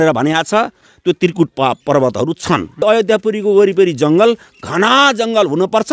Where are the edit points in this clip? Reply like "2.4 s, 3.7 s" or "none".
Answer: 0.9 s, 2.8 s